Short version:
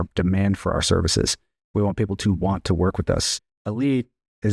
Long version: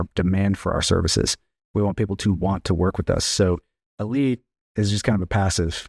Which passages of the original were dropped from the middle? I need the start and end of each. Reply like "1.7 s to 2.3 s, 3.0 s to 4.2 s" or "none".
3.3 s to 3.6 s